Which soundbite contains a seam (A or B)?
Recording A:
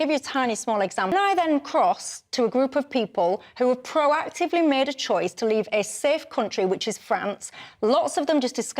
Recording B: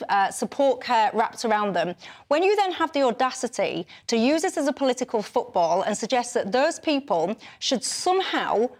A